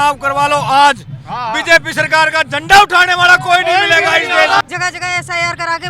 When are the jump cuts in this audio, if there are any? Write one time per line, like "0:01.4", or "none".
0:04.6